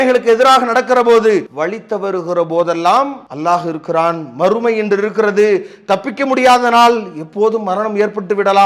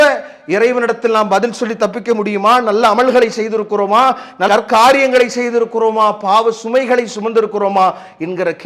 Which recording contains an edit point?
first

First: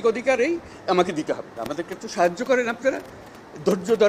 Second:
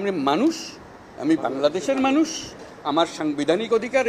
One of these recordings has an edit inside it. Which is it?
first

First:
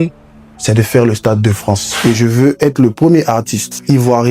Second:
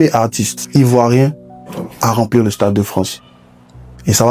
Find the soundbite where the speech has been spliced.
first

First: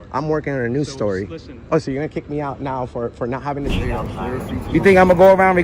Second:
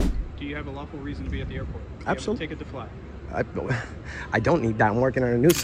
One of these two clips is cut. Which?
first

